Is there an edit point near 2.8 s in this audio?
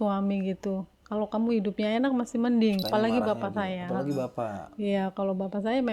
yes; 1 cut; at 2.8 s

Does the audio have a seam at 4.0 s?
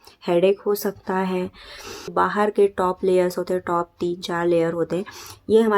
no; 1 cut; at 2.1 s

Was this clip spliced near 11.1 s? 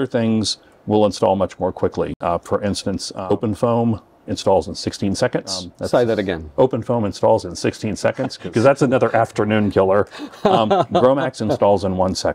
no; 3 cuts; at 3.1 s, 5.7 s, 8.3 s

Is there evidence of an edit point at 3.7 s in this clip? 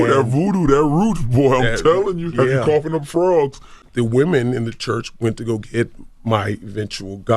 yes; 1 cut; at 3.7 s

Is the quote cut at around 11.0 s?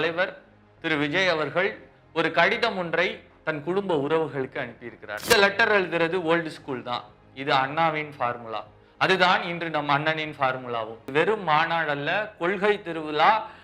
yes; 2 cuts; at 5.2 s, 11.0 s

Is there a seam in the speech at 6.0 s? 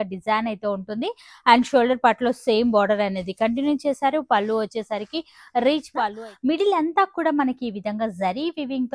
yes; 1 cut; at 6.0 s

